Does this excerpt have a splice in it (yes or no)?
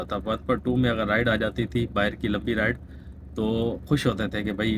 no